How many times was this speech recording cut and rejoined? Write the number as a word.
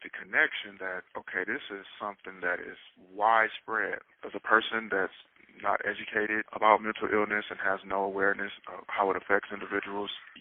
one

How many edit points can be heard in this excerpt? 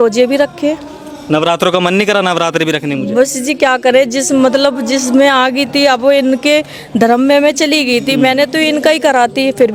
zero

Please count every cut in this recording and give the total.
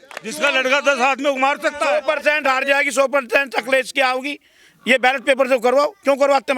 one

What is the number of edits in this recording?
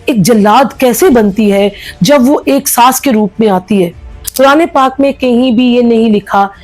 one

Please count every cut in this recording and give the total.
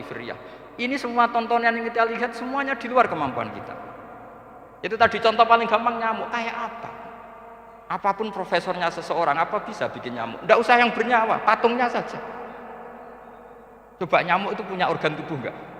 zero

